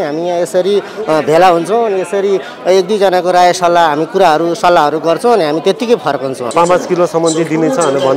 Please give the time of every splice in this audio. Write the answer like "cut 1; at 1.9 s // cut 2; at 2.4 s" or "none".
cut 1; at 6.5 s